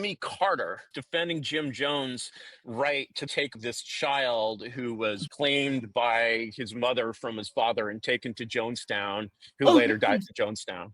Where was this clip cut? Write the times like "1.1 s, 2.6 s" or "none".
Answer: 0.9 s, 3.5 s, 5.2 s